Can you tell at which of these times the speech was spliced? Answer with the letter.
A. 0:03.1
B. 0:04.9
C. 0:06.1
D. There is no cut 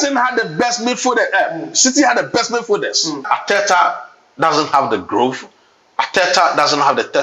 A